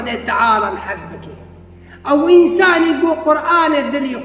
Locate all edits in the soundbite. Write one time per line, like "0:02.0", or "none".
none